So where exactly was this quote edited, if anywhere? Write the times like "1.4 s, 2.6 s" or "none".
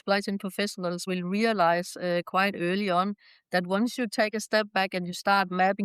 1.0 s